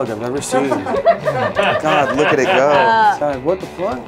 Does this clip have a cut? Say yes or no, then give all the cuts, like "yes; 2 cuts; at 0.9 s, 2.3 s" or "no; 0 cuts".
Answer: yes; 1 cut; at 3.2 s